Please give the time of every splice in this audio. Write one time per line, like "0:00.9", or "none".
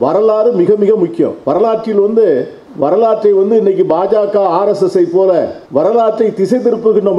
0:01.4
0:02.6
0:05.6